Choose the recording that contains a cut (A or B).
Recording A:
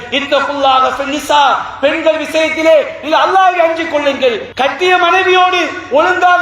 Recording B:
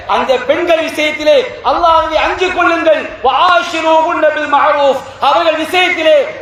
A